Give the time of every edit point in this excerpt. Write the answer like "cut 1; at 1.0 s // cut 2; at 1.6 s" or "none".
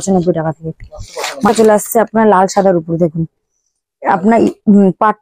cut 1; at 1.5 s